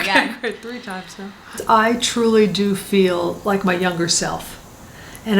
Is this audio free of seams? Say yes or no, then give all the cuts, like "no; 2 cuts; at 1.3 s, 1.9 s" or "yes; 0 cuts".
no; 1 cut; at 1.6 s